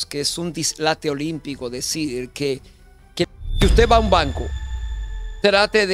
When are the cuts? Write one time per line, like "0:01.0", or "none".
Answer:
0:03.3